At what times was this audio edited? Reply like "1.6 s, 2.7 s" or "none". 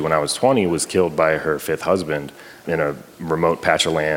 2.6 s